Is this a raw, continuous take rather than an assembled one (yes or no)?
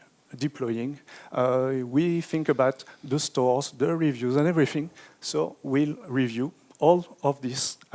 yes